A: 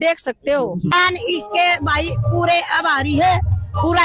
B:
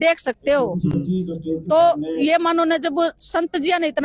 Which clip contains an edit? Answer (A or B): A